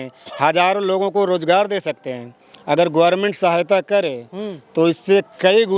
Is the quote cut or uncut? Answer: uncut